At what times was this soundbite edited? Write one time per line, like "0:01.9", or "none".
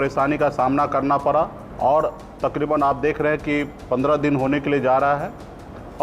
0:01.6